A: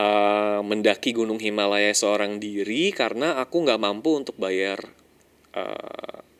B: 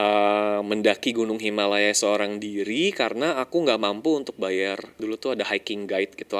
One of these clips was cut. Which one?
B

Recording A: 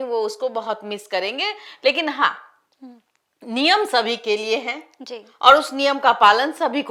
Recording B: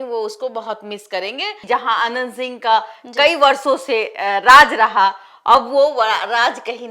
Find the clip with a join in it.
B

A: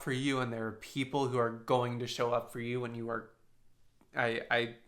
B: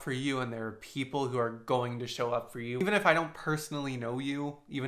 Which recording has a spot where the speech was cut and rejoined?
B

